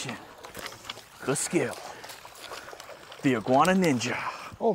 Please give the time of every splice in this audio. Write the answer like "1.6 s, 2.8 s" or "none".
none